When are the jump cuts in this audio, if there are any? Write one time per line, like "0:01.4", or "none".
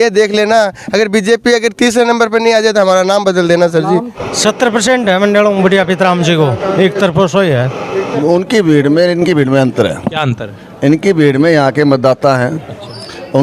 0:04.2
0:08.1